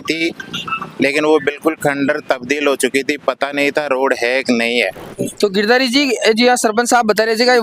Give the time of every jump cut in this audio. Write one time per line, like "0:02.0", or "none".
0:05.1